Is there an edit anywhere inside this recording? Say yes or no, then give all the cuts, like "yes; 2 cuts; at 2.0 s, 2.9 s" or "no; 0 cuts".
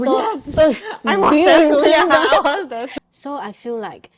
yes; 1 cut; at 2.9 s